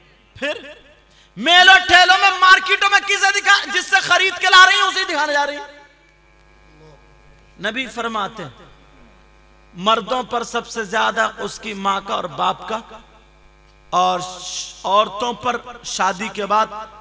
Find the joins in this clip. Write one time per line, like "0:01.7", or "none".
0:06.1